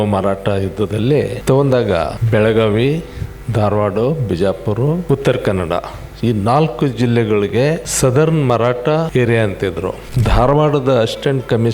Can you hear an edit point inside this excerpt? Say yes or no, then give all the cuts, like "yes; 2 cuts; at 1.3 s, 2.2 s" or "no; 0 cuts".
yes; 1 cut; at 10.1 s